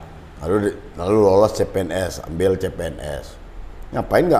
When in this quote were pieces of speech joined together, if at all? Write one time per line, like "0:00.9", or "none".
none